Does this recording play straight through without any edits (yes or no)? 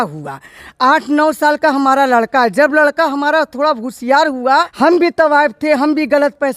no